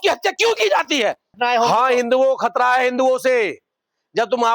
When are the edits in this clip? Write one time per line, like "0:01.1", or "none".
0:01.4